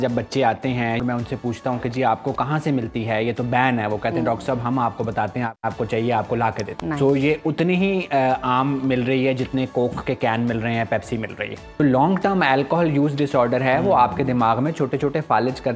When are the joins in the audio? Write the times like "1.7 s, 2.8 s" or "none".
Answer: 1.0 s, 5.5 s, 6.7 s, 11.8 s